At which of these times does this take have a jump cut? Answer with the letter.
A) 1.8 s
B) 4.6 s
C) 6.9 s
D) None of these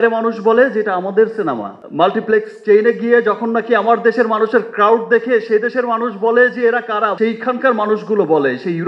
A